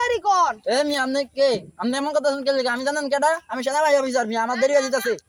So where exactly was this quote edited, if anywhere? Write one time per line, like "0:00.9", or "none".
none